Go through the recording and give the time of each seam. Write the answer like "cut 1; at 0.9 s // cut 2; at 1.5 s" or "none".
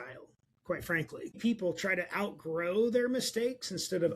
cut 1; at 1.4 s